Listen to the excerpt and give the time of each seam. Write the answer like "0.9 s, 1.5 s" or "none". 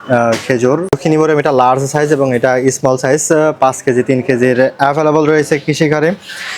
1.0 s